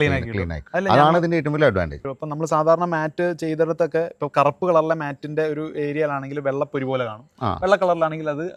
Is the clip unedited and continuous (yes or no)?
yes